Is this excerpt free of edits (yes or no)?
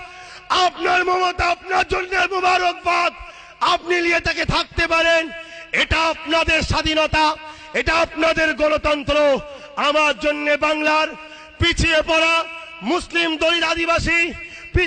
yes